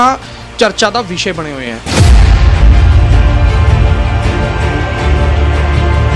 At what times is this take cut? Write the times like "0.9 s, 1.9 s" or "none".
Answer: 1.8 s

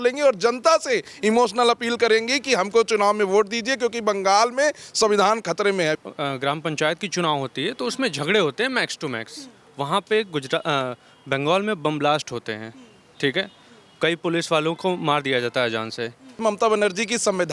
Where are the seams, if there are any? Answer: 6.0 s, 16.4 s

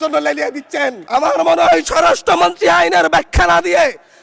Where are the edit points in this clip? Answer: 1.0 s

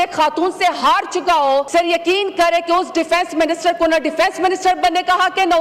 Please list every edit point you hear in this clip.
1.7 s

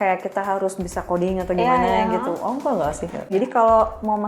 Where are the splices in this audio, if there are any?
3.2 s

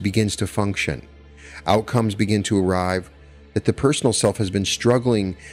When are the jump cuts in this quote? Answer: none

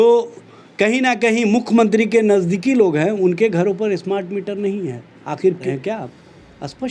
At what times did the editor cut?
5.6 s

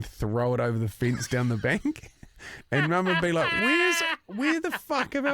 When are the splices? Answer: none

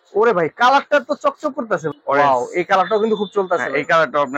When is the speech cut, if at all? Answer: 1.9 s

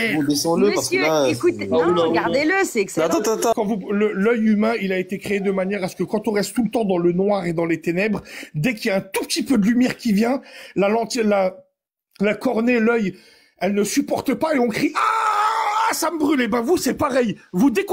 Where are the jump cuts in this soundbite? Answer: 3.5 s

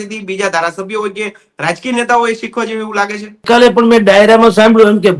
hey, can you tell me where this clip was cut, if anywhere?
3.5 s

